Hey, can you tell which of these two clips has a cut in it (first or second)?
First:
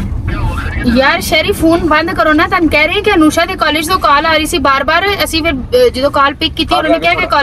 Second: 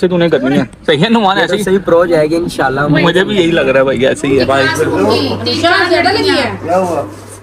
second